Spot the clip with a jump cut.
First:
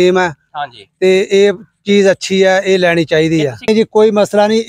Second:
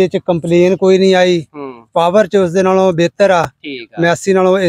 first; 1 cut; at 3.7 s

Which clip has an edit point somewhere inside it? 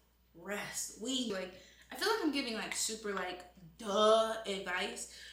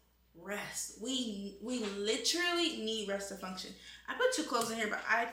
first; 1 cut; at 1.3 s

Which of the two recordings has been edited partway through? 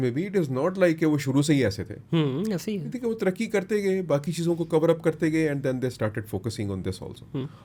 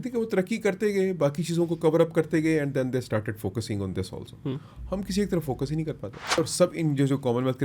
second; 1 cut; at 6.4 s

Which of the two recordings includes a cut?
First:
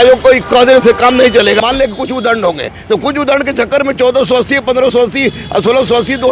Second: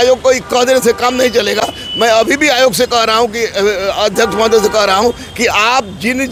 first; 1 cut; at 1.6 s

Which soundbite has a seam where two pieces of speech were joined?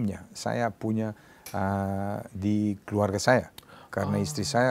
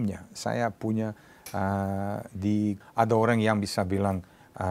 second; 1 cut; at 2.8 s

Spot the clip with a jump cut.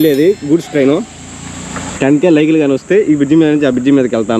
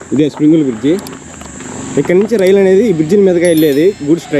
first; 1 cut; at 1.9 s

